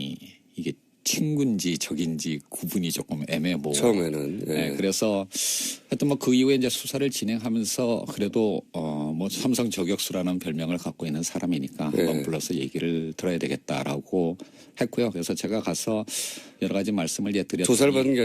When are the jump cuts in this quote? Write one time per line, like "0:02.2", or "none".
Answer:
0:08.7